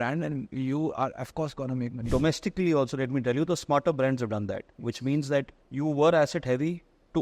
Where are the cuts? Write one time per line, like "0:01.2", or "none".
0:02.0
0:05.6